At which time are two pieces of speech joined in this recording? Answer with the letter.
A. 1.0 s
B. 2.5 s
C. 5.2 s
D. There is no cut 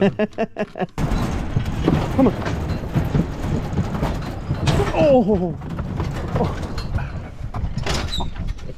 A